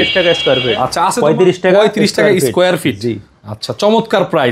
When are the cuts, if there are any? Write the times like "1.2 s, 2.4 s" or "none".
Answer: 1.1 s